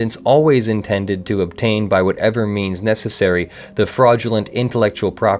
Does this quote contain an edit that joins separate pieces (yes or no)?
no